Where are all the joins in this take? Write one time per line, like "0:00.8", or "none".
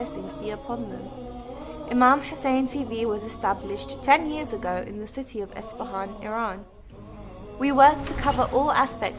none

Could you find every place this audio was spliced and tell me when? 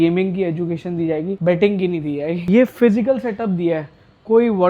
0:01.4
0:02.4

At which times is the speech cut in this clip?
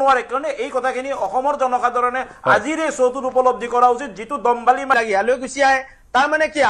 0:04.9

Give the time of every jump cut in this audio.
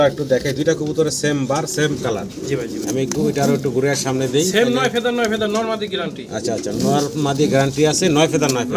none

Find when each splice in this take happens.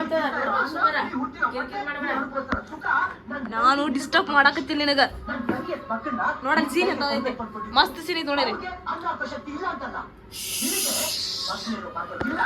none

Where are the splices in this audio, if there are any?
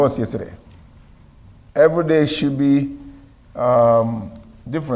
none

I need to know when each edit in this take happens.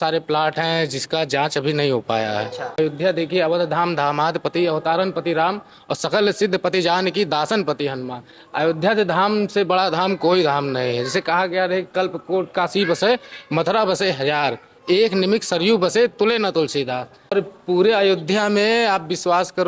0:02.8
0:17.3

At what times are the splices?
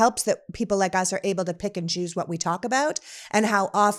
none

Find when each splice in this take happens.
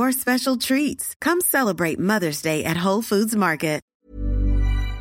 0:03.9

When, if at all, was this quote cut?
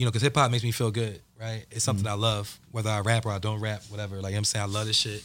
none

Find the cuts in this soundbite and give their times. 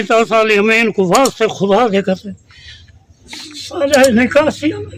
none

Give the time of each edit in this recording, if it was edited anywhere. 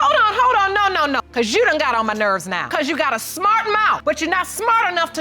0:01.2
0:02.6
0:04.0

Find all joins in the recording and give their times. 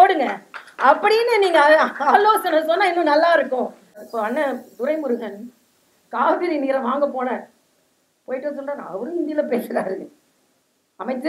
0:04.0

